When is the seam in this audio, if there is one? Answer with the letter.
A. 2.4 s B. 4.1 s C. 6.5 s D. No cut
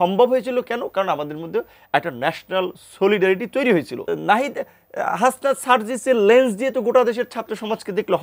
B